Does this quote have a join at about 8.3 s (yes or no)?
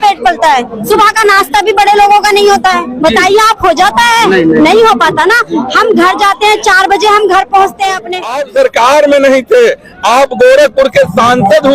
yes